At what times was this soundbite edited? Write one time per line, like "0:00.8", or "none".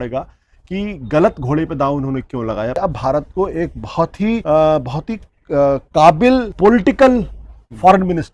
0:02.8
0:04.4
0:06.5